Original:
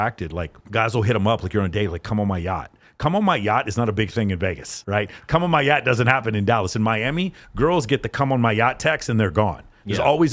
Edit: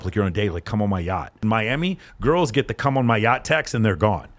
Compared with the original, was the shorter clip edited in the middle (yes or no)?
yes